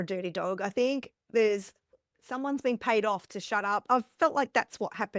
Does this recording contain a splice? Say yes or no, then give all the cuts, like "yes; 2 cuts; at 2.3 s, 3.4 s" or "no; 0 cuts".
yes; 1 cut; at 3.8 s